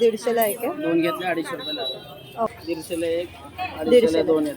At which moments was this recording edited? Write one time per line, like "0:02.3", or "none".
0:02.6